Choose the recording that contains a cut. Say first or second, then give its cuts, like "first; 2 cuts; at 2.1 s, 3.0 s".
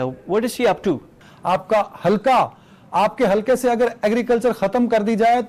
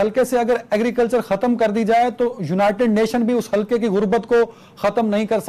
first; 1 cut; at 1.3 s